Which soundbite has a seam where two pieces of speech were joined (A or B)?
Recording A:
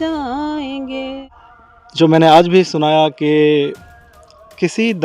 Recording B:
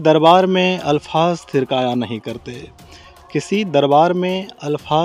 A